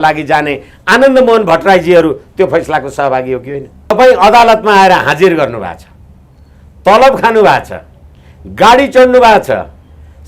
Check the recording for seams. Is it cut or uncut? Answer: cut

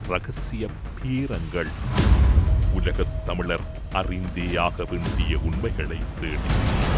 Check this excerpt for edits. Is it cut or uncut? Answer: uncut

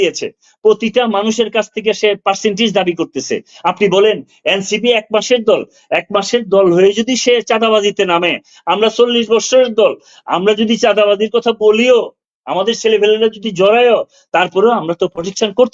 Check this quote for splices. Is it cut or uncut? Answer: uncut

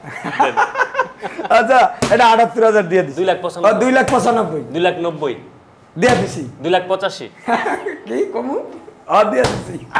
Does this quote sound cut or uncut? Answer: cut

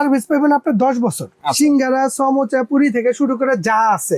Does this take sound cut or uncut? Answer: cut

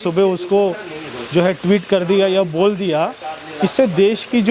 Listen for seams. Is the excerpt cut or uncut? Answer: uncut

